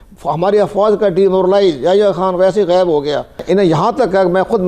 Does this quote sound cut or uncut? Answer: cut